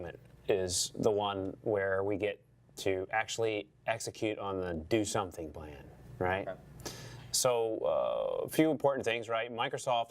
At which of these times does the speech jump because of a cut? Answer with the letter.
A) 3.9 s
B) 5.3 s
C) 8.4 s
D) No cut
B